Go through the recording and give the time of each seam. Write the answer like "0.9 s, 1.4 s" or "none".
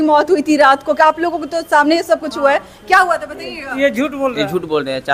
none